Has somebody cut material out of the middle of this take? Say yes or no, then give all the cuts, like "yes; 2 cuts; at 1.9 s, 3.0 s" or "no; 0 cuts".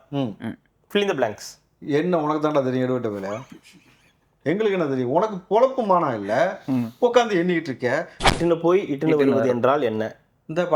yes; 1 cut; at 8.2 s